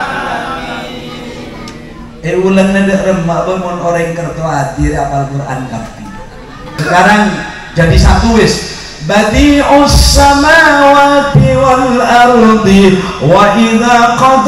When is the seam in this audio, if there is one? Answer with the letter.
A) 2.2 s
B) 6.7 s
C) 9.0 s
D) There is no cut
B